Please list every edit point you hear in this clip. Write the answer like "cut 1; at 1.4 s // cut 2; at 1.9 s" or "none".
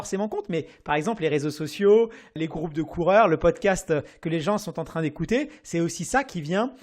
cut 1; at 2.4 s